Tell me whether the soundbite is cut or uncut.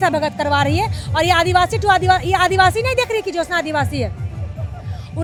uncut